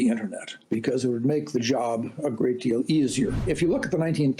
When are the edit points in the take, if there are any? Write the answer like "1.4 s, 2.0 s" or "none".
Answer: 3.4 s